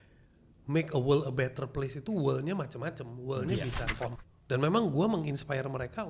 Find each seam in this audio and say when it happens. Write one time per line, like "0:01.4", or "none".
0:04.2

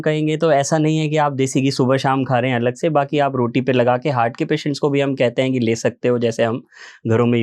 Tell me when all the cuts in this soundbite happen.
none

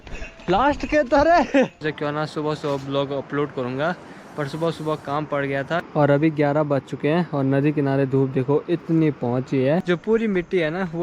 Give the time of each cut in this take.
0:01.8
0:05.9
0:09.8

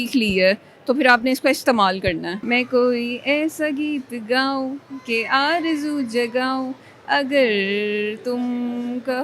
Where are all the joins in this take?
0:02.3

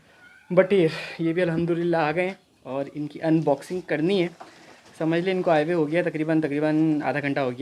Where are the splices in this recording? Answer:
none

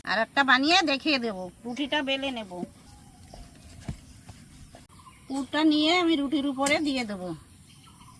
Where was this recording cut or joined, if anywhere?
0:02.8
0:04.8

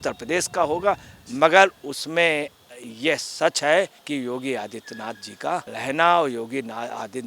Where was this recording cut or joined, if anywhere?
0:04.0

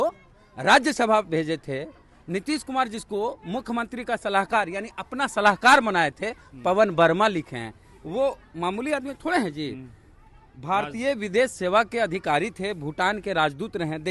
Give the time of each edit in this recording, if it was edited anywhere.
none

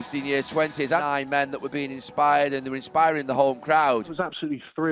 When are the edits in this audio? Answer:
0:01.0
0:04.1

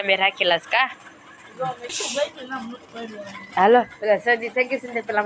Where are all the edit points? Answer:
0:01.9

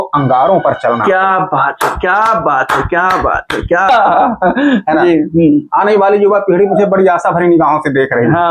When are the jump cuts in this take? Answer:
0:03.9

